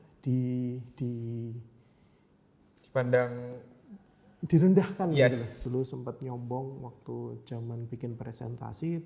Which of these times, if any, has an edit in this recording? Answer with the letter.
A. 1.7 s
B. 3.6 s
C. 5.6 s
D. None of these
C